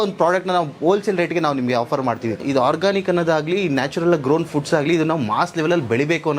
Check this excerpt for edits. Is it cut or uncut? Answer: cut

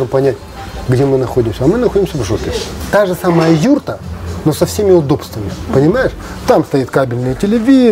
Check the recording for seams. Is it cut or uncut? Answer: cut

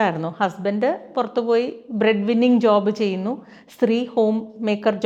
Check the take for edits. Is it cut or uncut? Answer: uncut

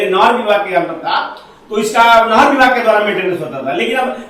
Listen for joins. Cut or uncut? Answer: uncut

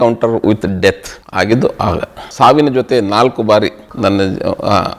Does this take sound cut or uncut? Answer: cut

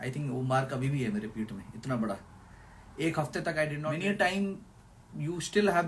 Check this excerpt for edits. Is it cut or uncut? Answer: cut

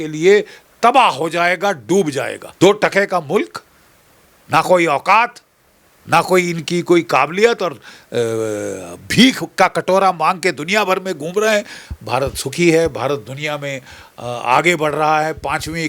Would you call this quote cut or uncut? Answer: cut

